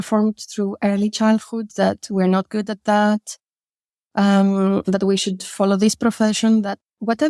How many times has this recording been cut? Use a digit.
0